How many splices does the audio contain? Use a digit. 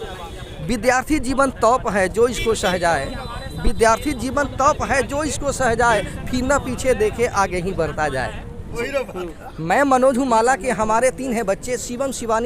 1